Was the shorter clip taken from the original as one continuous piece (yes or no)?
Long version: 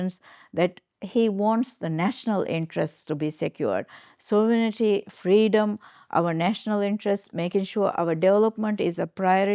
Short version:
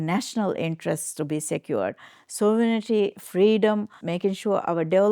no